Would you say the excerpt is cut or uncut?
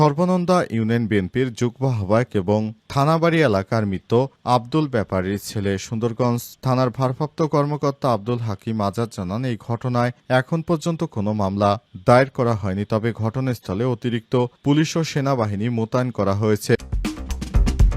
cut